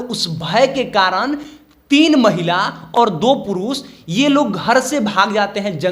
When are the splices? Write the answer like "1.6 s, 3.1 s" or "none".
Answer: 2.9 s